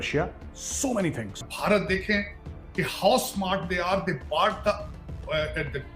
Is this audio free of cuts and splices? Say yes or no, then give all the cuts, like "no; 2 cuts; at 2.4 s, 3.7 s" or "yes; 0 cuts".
no; 1 cut; at 1.5 s